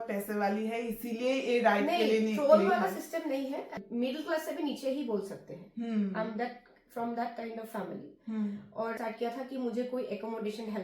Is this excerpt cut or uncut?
cut